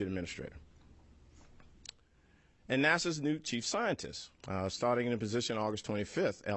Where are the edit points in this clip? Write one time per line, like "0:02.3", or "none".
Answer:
none